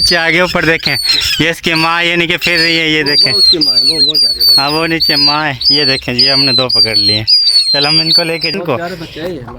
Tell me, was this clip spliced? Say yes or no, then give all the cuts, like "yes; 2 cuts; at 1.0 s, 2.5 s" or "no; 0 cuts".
yes; 1 cut; at 8.5 s